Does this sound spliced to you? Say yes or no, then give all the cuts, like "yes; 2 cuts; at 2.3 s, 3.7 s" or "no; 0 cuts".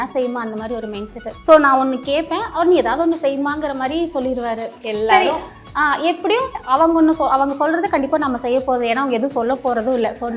yes; 1 cut; at 1.2 s